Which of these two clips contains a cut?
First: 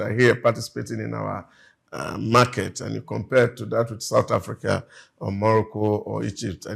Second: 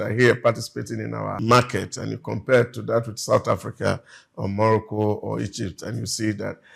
second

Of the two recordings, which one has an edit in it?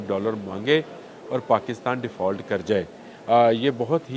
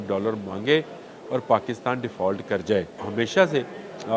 second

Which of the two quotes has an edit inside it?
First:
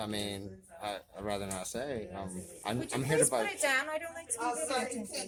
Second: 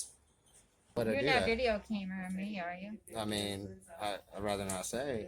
second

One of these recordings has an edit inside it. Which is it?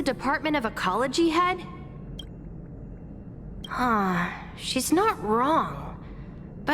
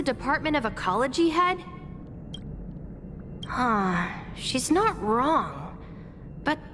first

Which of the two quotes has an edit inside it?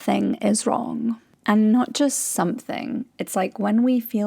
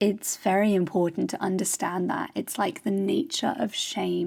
first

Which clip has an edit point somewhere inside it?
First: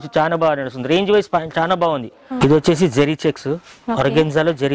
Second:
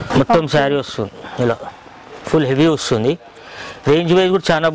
first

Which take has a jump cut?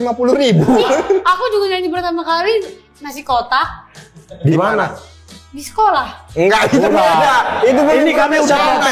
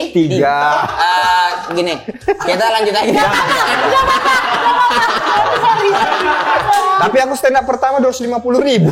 second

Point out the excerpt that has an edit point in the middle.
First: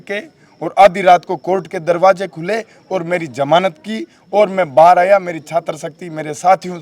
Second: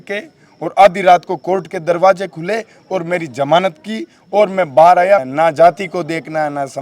second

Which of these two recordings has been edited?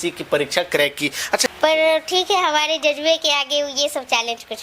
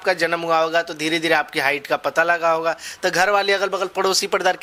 first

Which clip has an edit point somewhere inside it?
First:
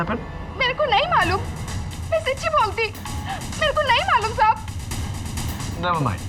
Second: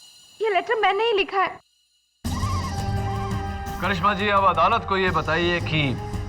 second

